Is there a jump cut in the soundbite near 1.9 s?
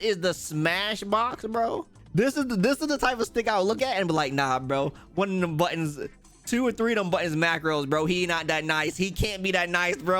yes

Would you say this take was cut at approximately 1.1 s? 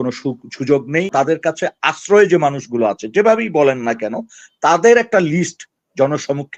yes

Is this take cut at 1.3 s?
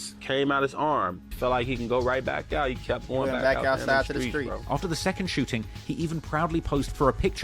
yes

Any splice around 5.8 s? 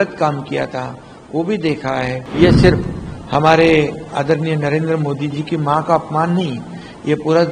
no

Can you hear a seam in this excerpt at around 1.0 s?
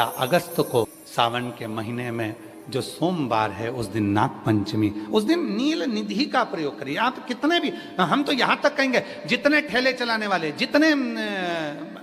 yes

